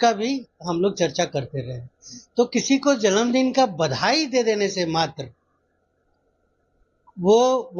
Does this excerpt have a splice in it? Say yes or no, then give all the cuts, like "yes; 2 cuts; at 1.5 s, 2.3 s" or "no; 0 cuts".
no; 0 cuts